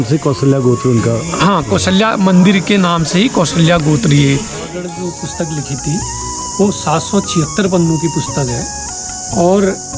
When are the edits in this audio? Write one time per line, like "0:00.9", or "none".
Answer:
0:04.9